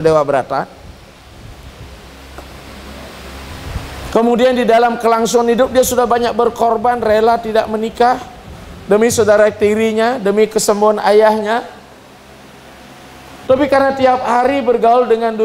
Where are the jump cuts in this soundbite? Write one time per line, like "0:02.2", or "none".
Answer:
none